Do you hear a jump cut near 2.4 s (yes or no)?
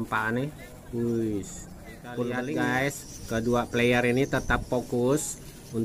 yes